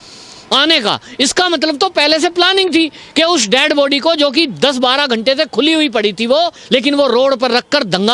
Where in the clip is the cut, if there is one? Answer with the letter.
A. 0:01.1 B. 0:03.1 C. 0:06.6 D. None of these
C